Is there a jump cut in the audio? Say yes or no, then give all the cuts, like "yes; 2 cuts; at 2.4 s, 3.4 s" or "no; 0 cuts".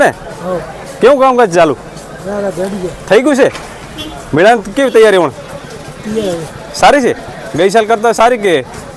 no; 0 cuts